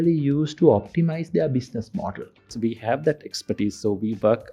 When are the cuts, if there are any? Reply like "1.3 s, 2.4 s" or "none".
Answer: 2.5 s